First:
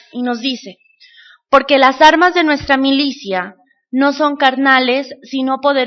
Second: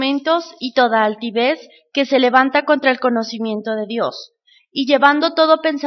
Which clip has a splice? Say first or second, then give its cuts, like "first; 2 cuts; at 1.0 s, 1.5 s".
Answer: second; 1 cut; at 1.3 s